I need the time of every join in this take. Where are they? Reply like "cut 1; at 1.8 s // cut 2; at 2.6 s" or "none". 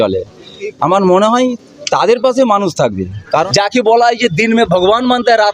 none